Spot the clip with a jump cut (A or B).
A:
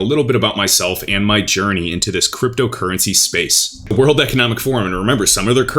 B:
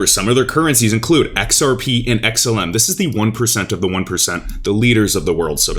A